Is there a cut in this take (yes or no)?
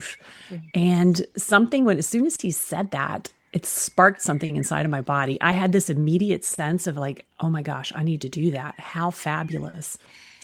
no